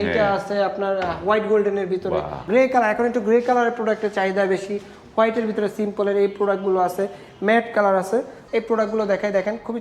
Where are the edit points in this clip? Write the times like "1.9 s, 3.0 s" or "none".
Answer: 2.4 s, 8.4 s